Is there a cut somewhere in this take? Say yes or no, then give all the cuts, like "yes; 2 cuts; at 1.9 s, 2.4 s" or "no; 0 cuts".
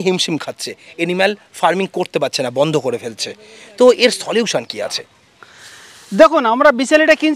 yes; 1 cut; at 5.0 s